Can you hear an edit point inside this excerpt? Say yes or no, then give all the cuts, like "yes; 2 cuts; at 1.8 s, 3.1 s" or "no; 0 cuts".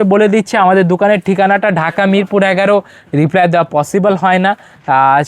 yes; 1 cut; at 3.0 s